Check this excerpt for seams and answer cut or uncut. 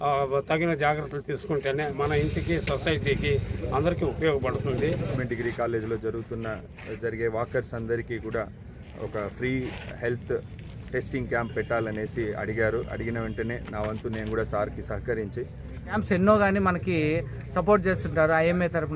cut